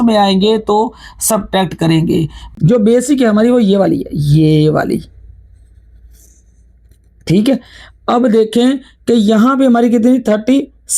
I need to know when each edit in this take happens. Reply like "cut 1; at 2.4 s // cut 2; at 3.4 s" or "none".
cut 1; at 2.4 s